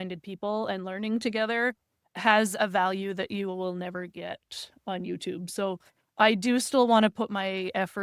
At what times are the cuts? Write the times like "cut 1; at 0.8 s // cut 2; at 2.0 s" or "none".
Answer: none